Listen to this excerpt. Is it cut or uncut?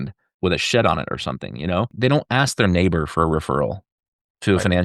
cut